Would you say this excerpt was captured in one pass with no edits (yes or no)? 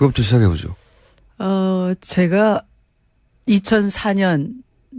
no